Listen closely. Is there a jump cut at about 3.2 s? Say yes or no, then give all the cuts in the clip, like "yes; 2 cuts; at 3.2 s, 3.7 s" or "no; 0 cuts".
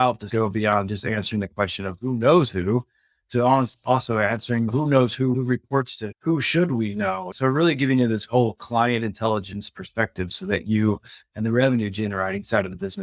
no; 1 cut; at 7.3 s